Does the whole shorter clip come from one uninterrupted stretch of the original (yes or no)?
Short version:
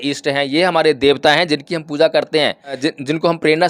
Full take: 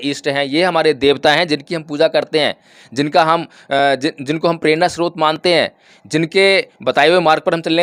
no